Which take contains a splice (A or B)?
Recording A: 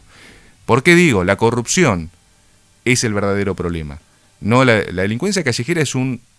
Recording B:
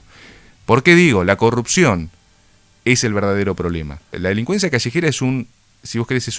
B